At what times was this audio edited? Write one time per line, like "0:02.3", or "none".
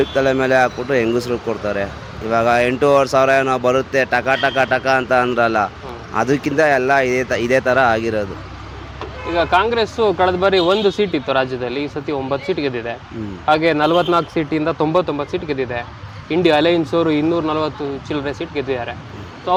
none